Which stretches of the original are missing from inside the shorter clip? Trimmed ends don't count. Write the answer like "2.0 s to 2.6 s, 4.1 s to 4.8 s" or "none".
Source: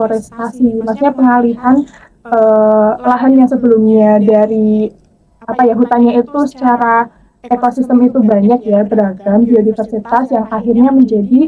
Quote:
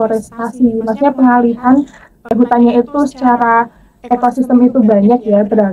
2.3 s to 5.7 s